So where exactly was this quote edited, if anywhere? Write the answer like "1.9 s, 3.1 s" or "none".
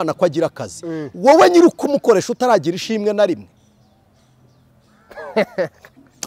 none